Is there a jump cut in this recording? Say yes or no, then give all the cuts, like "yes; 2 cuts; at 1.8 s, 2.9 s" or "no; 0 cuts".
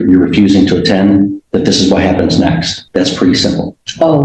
yes; 1 cut; at 2.7 s